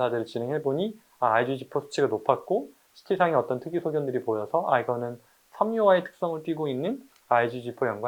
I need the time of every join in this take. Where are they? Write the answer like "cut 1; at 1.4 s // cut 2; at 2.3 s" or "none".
none